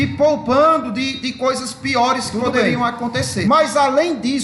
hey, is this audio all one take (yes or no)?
no